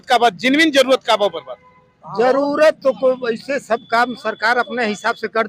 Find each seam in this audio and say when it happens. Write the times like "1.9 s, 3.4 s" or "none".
none